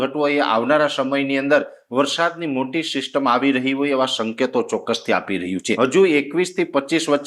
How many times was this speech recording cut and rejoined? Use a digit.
1